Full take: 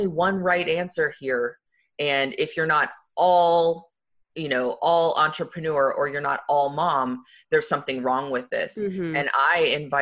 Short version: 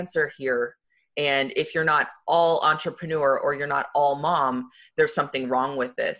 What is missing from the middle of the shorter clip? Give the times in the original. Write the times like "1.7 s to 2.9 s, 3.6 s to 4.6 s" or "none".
3.0 s to 4.7 s

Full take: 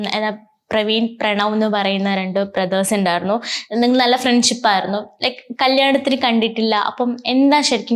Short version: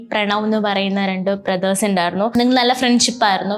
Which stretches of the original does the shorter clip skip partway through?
3.4 s to 3.8 s

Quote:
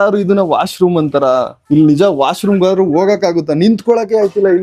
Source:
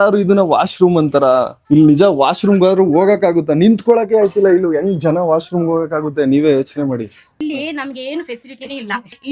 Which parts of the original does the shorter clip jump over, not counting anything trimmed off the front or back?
none

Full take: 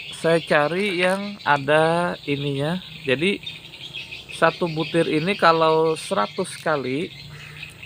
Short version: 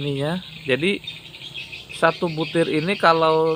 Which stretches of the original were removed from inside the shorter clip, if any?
none

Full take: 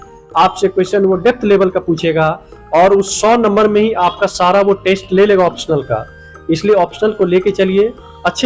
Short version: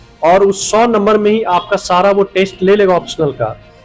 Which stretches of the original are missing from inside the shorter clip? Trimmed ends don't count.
none

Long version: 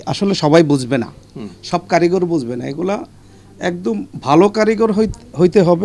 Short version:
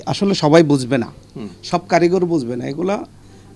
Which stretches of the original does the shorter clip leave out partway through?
none

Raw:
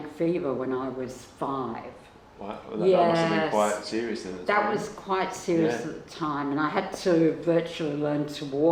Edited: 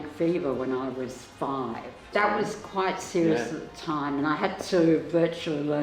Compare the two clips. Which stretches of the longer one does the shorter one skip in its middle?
2.0 s to 4.3 s

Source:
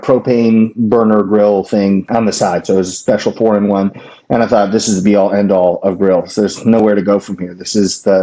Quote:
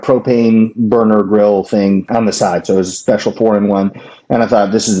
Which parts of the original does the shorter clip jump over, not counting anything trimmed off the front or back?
none

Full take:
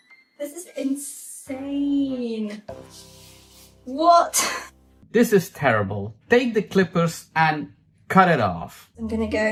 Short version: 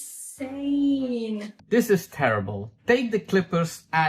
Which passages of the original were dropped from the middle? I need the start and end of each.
2.6 s to 4.9 s

